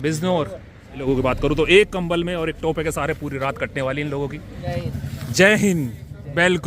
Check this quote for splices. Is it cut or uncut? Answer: cut